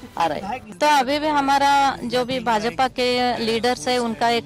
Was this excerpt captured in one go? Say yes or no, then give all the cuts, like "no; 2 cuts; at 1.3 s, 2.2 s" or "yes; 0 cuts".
yes; 0 cuts